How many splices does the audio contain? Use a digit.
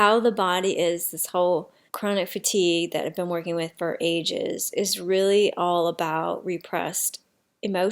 1